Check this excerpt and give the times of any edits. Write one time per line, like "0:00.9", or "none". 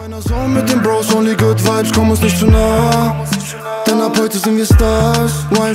none